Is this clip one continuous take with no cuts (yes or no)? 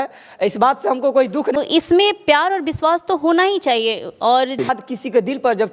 no